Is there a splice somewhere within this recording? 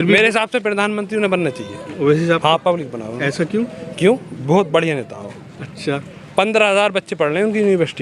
no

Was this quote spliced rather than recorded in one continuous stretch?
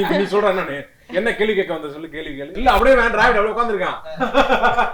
yes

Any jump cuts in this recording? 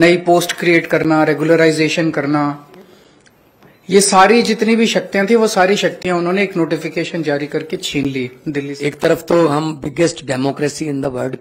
yes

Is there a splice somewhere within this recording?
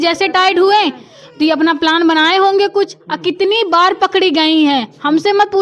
no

